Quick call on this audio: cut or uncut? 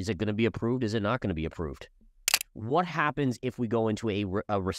cut